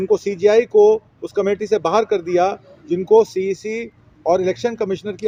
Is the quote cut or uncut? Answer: uncut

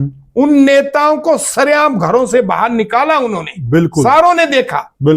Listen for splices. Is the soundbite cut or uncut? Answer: uncut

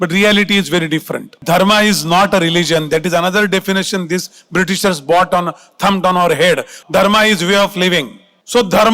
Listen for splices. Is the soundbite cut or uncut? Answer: cut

